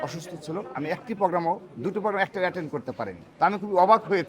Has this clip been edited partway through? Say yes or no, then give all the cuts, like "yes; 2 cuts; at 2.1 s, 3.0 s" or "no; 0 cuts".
yes; 1 cut; at 3.2 s